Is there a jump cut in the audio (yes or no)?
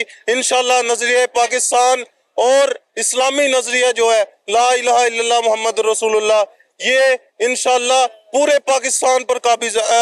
no